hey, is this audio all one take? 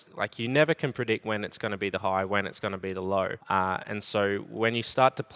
no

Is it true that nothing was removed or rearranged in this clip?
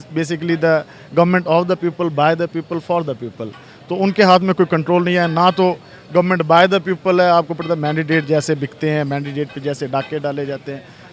yes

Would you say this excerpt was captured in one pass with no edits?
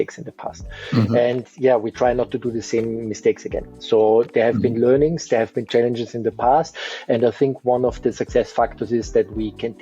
yes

